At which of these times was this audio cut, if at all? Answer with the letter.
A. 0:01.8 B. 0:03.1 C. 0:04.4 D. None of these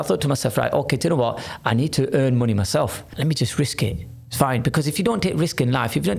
B